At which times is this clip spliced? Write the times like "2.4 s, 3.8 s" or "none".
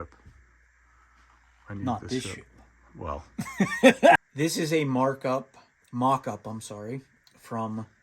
4.2 s